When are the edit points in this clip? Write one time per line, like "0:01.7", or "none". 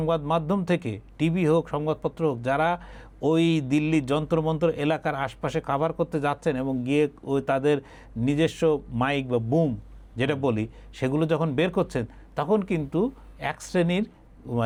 none